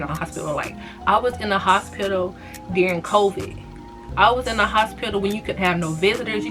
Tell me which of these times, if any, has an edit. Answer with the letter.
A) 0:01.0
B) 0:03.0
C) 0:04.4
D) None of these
D